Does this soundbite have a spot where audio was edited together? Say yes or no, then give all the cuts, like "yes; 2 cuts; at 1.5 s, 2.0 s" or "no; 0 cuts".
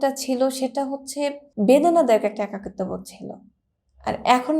yes; 1 cut; at 1.4 s